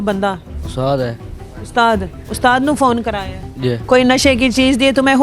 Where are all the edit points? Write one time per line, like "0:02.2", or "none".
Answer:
0:03.8